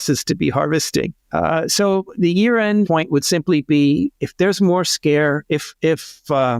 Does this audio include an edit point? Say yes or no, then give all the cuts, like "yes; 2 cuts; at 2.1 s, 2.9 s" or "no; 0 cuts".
yes; 3 cuts; at 1.2 s, 2.9 s, 5.7 s